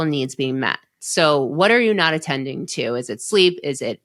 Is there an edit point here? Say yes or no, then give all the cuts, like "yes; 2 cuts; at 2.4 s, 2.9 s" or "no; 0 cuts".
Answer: yes; 1 cut; at 0.9 s